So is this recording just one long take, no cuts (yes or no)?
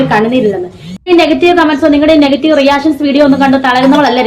no